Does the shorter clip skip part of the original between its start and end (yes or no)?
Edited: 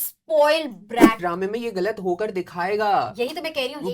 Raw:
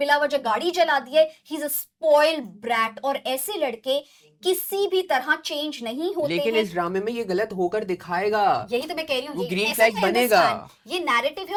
yes